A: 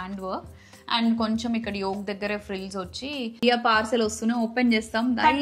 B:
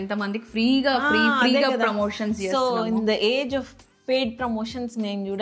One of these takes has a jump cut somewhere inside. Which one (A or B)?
A